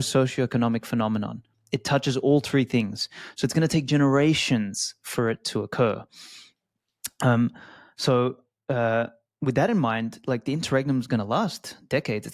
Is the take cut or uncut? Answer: uncut